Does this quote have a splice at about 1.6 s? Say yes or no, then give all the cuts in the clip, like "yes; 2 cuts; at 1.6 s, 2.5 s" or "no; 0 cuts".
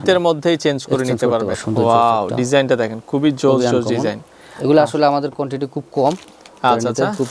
yes; 1 cut; at 1.6 s